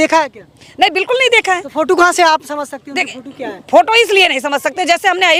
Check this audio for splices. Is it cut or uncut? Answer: uncut